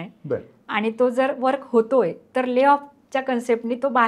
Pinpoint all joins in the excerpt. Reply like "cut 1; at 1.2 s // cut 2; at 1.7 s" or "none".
none